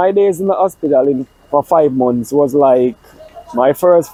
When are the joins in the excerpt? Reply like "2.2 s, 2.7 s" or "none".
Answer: none